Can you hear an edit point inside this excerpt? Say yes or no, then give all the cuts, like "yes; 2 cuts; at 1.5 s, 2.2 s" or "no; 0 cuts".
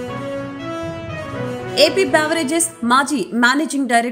no; 0 cuts